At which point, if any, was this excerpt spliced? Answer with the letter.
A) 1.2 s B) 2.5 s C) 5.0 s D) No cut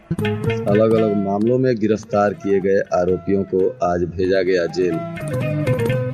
D